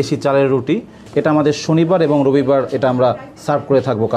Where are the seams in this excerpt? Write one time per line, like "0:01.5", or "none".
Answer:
0:01.0